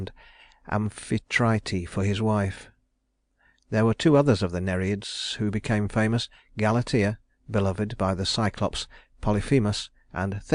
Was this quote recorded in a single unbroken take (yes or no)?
no